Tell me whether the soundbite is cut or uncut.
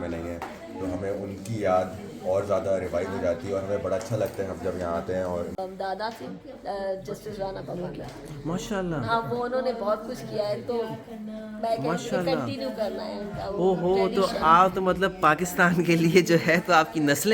cut